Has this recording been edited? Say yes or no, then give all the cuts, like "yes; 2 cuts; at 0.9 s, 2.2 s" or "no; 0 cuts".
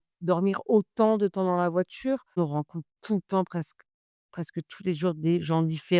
yes; 1 cut; at 2.4 s